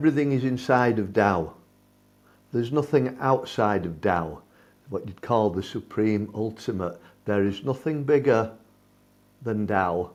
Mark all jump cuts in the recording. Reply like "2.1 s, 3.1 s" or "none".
none

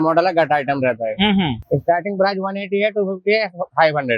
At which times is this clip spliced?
1.6 s

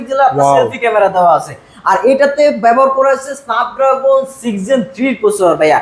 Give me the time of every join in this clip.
none

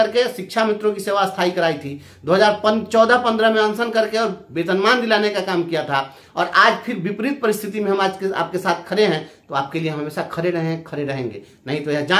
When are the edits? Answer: none

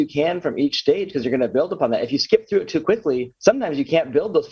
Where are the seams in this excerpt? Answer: 3.3 s

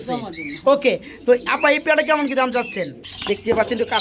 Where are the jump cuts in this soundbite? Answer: 3.1 s

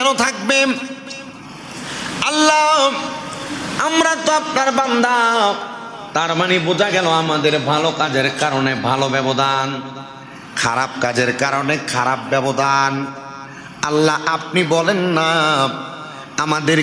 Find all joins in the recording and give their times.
none

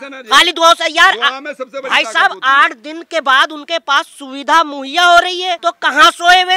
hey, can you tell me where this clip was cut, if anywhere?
5.6 s

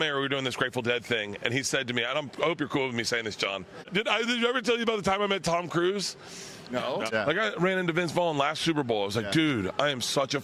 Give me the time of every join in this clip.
3.8 s, 7.1 s

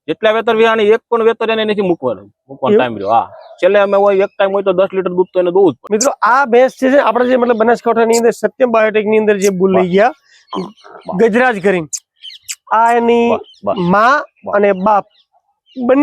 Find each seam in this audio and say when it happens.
5.8 s

